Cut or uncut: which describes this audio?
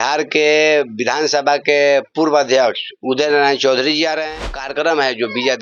cut